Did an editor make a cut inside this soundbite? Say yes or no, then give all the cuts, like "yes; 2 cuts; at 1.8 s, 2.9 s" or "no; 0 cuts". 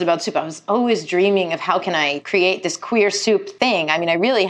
no; 0 cuts